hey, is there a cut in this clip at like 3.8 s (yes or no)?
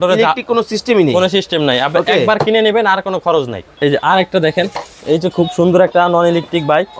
yes